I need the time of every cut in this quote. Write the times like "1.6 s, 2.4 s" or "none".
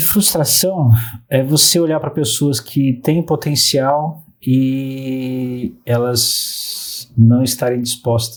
none